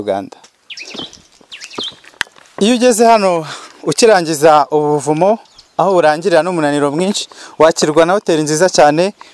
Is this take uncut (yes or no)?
yes